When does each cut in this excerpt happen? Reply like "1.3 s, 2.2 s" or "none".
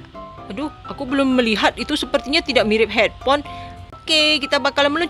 4.0 s